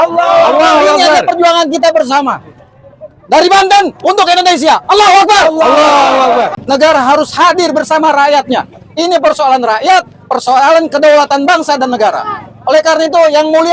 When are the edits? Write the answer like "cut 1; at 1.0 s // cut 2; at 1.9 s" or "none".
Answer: cut 1; at 6.6 s